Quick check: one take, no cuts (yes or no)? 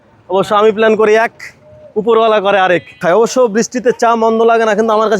no